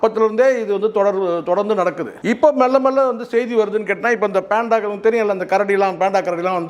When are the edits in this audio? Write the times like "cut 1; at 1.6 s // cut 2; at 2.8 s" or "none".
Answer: cut 1; at 2.1 s